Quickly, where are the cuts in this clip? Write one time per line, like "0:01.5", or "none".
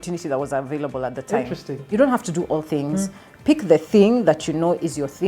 0:01.9